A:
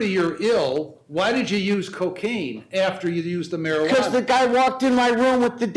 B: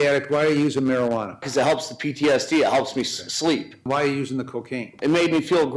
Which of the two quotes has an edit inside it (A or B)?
B